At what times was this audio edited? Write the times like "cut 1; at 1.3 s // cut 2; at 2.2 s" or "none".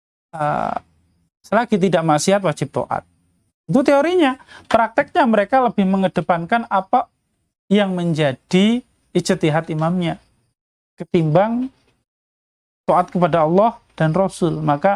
none